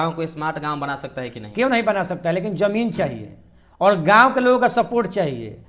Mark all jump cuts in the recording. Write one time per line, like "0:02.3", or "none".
none